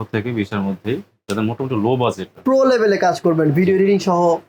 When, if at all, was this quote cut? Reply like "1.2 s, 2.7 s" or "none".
2.3 s